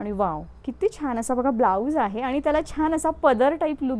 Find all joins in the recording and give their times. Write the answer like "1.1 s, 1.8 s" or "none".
none